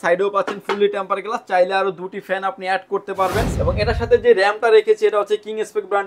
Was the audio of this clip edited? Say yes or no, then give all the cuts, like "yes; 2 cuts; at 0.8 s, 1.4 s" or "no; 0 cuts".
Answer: yes; 1 cut; at 3.5 s